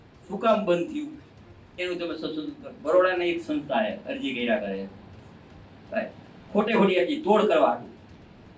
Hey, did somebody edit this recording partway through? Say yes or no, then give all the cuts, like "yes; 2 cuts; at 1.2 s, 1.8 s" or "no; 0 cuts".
yes; 1 cut; at 2.7 s